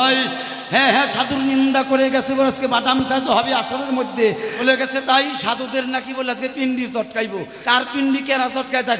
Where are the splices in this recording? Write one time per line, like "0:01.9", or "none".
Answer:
0:04.6
0:07.5